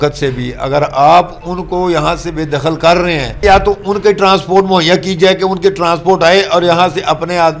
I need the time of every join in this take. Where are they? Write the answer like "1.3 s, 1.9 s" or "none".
3.4 s